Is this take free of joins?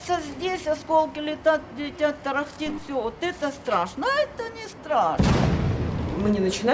no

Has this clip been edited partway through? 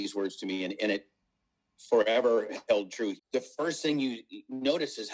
yes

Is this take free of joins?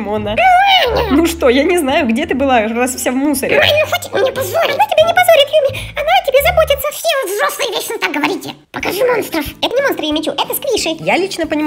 yes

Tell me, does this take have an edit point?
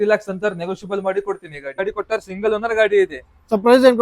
yes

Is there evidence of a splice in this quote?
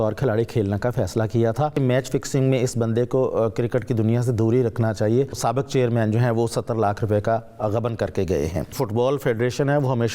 yes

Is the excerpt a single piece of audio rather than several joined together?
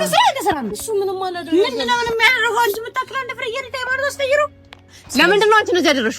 no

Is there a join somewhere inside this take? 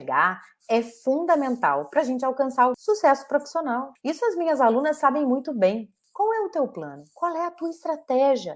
yes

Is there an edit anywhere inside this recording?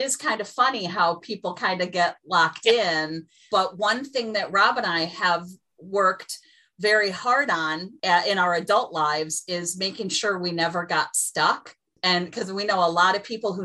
yes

